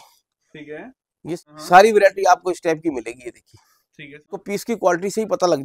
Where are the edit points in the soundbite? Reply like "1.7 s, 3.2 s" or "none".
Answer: 1.3 s, 4.4 s

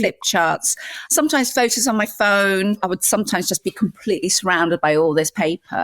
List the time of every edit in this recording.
1.0 s, 2.8 s

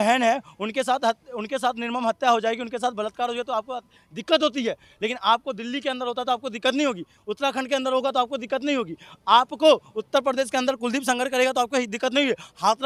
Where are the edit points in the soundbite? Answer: none

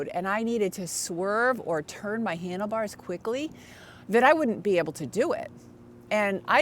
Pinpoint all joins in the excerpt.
none

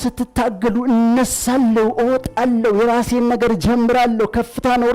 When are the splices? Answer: none

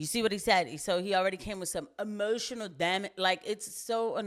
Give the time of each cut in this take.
none

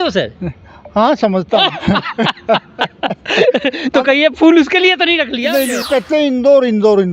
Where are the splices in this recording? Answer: 5.8 s

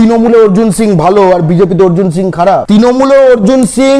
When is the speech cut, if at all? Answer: 2.6 s

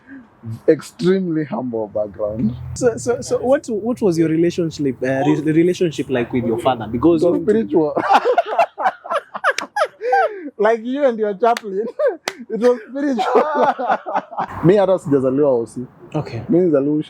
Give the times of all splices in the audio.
2.7 s, 14.4 s

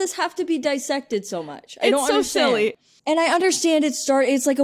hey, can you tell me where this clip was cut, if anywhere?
2.8 s

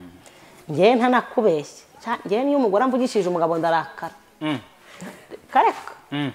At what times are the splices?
none

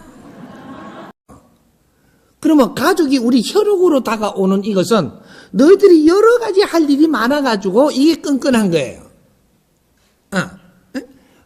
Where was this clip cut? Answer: 1.4 s

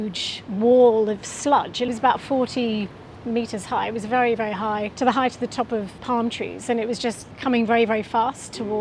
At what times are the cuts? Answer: 1.9 s, 5.9 s, 7.3 s

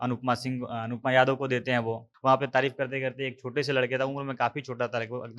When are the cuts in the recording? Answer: 2.1 s

